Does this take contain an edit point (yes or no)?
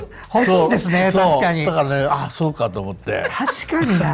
no